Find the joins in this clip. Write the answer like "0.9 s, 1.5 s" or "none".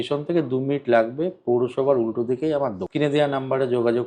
2.8 s